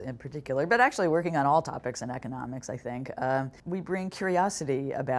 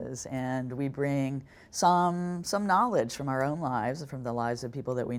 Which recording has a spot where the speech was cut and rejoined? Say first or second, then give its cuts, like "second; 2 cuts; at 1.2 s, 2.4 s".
first; 1 cut; at 3.6 s